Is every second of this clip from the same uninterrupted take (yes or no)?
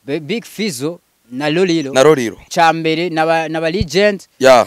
no